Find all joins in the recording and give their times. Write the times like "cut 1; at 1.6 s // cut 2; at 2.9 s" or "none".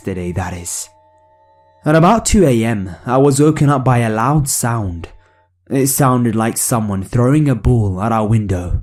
none